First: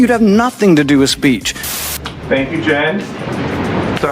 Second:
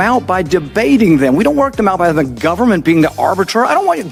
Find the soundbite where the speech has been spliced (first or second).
first